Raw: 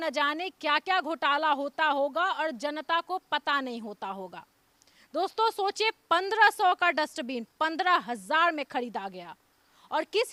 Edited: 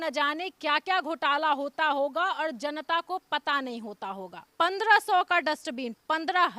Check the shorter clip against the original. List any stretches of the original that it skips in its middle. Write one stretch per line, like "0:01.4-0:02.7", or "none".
0:04.5-0:06.0